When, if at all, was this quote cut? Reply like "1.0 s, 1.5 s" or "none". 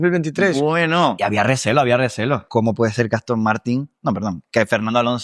1.2 s, 2.5 s